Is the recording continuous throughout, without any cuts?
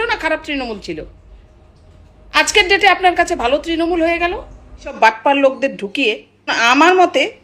no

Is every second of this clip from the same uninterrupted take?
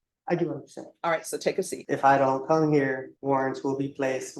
no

